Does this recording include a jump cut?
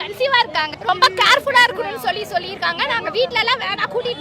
no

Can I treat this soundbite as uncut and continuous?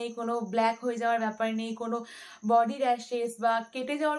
yes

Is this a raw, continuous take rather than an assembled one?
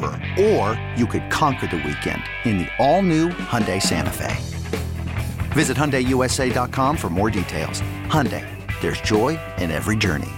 yes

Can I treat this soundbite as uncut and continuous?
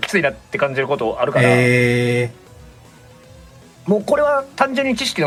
yes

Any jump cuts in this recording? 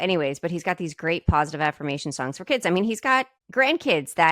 yes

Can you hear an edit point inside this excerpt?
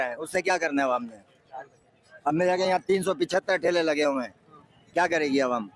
no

